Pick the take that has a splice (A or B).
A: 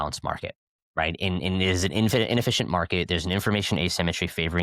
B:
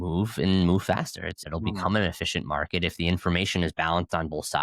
B